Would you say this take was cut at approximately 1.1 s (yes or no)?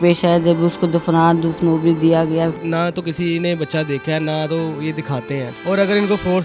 no